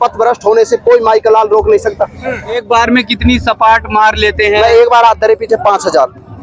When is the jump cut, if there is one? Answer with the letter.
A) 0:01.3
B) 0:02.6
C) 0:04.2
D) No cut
B